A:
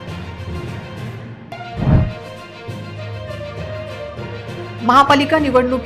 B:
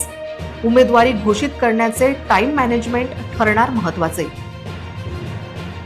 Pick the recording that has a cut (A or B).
A